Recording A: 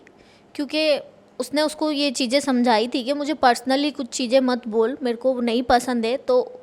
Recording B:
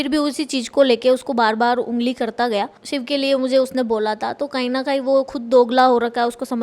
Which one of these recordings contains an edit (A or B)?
B